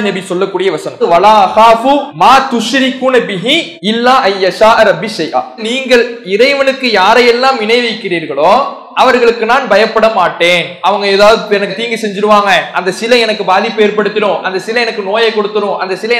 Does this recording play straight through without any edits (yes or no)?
no